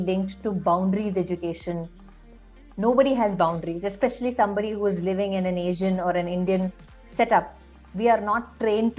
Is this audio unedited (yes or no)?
yes